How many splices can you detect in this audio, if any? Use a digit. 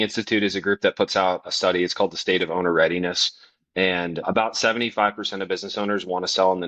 2